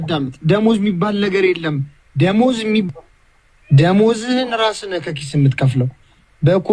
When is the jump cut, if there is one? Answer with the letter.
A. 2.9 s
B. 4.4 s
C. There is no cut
A